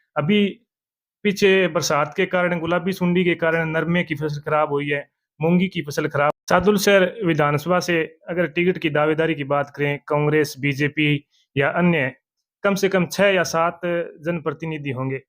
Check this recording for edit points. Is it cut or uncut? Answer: cut